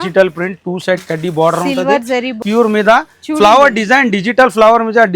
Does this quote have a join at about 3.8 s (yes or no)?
no